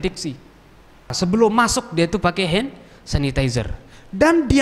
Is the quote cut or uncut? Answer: cut